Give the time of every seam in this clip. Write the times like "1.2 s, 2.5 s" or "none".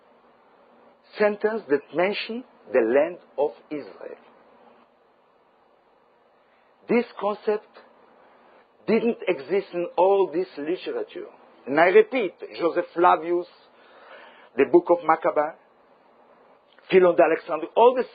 8.9 s